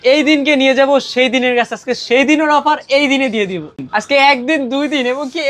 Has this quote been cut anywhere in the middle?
yes; 1 cut; at 3.8 s

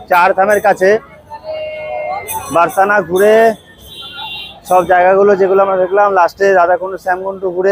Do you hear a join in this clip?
no; 0 cuts

